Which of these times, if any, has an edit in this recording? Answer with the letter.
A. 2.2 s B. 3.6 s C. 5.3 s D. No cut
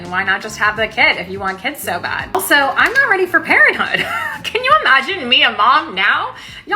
A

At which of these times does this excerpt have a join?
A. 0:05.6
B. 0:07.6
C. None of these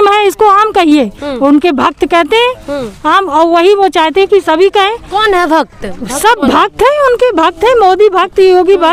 C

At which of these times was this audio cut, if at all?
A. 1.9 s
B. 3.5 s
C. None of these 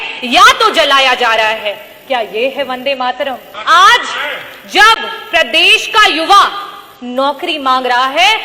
B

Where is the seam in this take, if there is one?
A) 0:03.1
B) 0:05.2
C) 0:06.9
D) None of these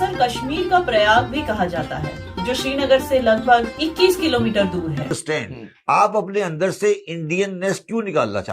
B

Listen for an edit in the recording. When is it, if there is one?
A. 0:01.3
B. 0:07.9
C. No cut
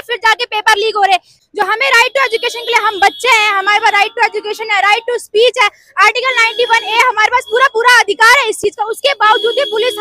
A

